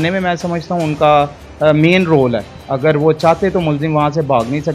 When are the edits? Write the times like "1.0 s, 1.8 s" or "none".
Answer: none